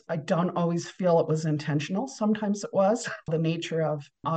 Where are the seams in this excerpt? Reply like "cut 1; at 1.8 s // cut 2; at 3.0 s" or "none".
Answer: cut 1; at 3.3 s